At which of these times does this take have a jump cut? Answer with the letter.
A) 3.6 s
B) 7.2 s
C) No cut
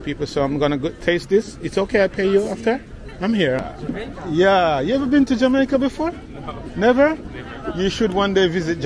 A